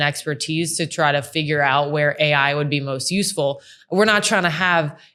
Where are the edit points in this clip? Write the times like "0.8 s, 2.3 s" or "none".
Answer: none